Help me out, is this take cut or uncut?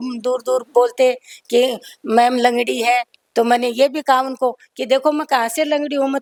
uncut